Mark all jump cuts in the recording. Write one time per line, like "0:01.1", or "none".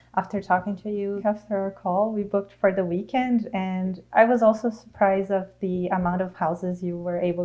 0:01.2